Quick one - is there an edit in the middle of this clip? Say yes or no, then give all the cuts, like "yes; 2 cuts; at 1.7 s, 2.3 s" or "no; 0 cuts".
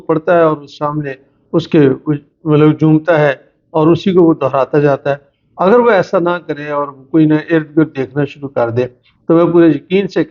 no; 0 cuts